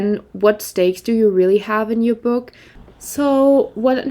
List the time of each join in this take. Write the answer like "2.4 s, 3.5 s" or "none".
2.8 s